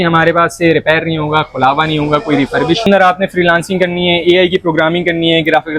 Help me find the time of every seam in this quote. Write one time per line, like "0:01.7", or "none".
0:02.8